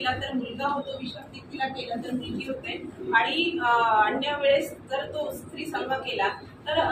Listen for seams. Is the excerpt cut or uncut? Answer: uncut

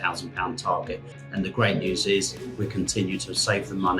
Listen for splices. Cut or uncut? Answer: cut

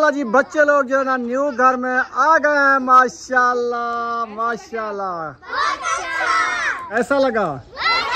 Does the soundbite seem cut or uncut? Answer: uncut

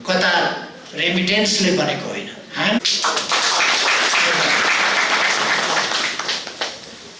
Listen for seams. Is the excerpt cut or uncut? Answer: uncut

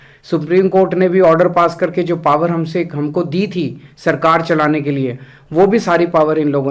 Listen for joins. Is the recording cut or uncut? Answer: uncut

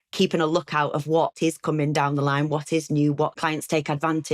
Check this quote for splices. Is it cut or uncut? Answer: cut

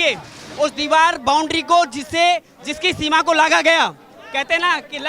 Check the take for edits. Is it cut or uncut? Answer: uncut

